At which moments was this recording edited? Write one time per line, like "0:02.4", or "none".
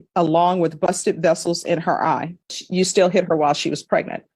0:02.6

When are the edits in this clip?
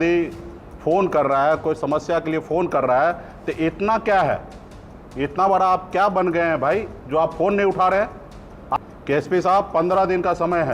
0:08.6

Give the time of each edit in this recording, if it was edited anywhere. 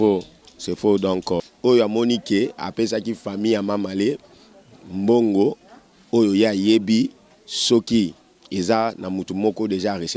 0:01.4

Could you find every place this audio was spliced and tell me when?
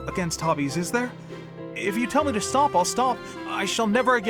none

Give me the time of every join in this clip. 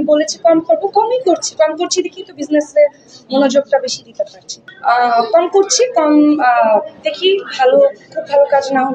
0:04.5

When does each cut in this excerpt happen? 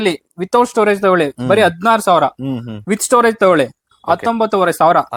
none

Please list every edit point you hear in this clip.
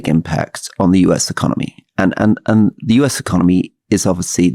none

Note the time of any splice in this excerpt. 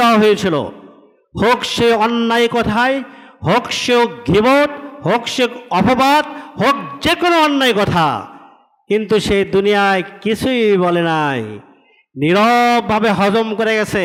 none

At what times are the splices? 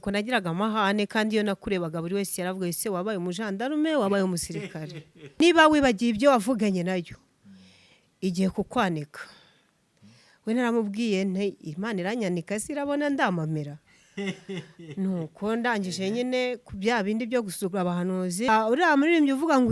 0:05.4
0:18.5

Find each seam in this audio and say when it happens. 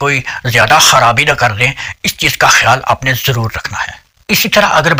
none

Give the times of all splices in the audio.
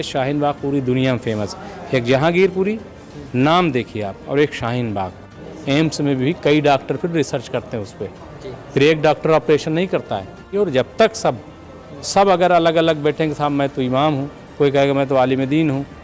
0:05.5
0:10.5

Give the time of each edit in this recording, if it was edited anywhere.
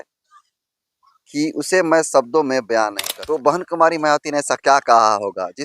0:03.1

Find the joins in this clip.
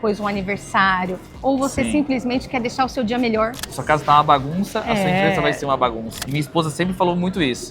0:03.7
0:06.1

